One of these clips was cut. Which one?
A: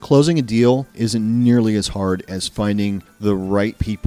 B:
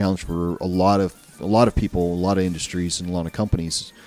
A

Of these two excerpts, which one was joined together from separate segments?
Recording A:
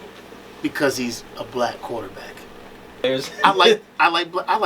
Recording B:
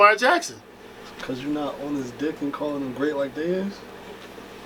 A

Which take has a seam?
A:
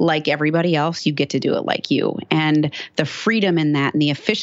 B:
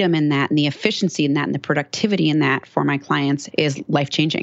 B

